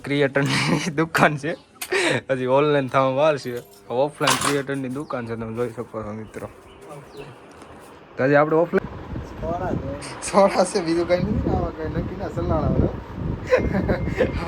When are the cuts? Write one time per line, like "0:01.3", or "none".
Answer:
0:08.8